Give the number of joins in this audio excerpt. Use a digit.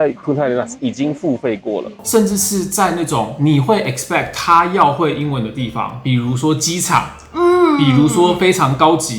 1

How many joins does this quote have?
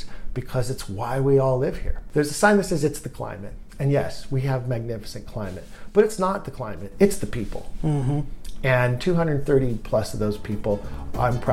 1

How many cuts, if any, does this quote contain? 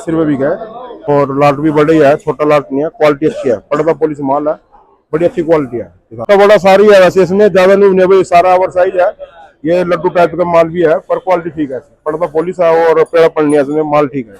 2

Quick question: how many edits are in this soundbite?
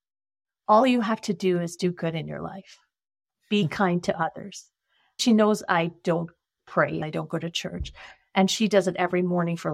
2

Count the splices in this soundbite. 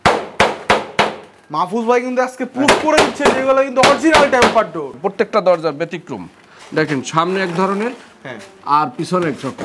1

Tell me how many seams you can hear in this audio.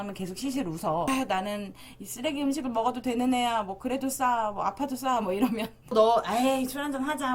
2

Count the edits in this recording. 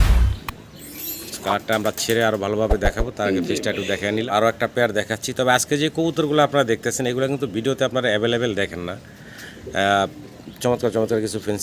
1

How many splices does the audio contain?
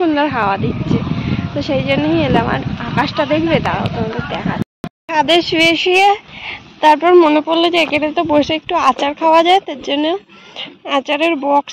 1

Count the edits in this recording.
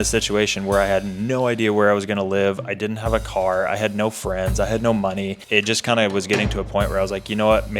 0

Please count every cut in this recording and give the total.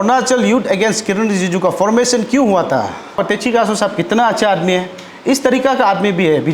1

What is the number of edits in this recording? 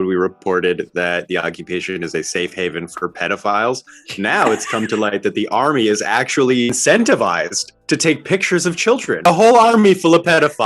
2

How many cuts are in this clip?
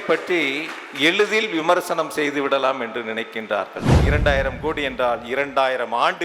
1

